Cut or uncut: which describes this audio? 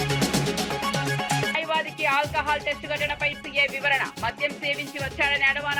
uncut